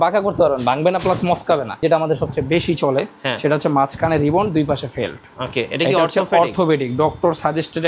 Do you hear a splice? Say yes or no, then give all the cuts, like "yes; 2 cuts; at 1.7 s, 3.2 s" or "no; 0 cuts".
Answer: yes; 1 cut; at 1.8 s